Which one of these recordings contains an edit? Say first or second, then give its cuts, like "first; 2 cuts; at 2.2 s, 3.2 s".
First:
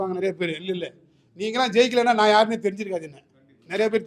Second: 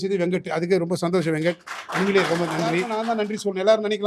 second; 1 cut; at 2.9 s